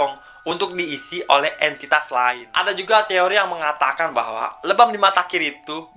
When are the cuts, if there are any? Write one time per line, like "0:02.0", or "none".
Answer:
0:02.5